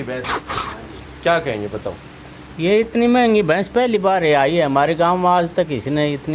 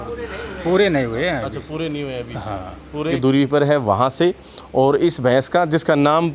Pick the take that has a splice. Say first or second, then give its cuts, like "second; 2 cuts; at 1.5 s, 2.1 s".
second; 1 cut; at 3.1 s